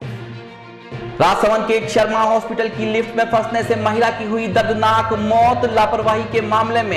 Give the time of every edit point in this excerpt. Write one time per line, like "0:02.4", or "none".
0:01.0